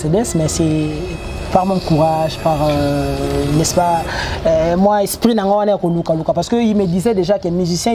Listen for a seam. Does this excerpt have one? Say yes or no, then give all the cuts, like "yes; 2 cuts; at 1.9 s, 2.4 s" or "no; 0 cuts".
no; 0 cuts